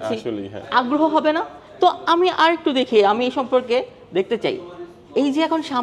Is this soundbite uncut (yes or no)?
yes